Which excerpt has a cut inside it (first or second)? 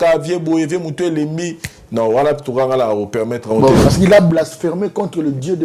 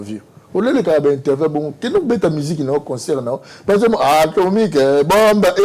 first